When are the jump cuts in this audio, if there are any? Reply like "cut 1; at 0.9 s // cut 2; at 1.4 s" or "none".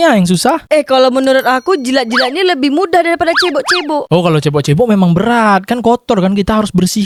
none

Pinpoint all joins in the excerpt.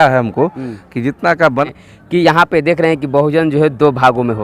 cut 1; at 1.6 s

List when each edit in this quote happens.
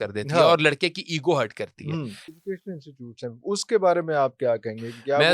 cut 1; at 2.4 s

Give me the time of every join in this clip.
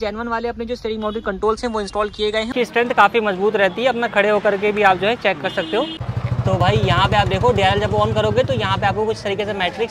cut 1; at 2.5 s // cut 2; at 6.0 s

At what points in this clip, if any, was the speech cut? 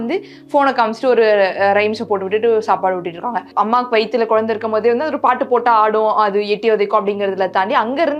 cut 1; at 3.5 s

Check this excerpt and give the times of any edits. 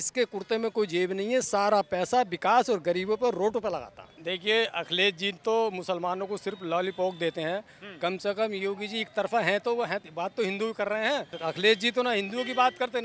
cut 1; at 4.1 s // cut 2; at 11.3 s

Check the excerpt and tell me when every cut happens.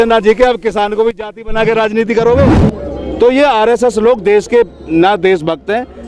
cut 1; at 2.5 s

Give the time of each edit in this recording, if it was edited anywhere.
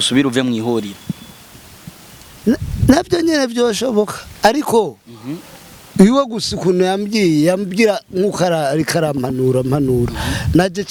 none

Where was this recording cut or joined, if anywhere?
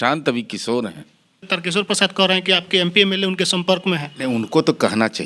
cut 1; at 1.5 s

